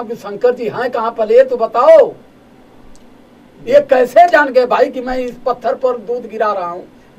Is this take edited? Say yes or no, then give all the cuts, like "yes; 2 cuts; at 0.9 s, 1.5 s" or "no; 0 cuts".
no; 0 cuts